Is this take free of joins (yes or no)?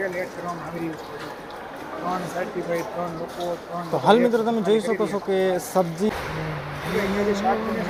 yes